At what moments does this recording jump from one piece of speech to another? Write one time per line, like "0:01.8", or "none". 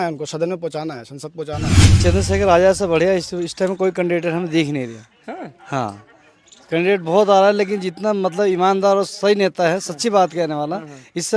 0:01.9